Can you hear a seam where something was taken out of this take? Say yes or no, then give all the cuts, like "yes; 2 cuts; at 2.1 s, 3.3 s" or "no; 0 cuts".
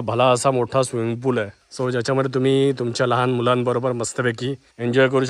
no; 0 cuts